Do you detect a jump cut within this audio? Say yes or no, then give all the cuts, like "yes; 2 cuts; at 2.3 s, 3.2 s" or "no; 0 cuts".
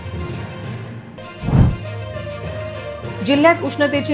yes; 1 cut; at 1.0 s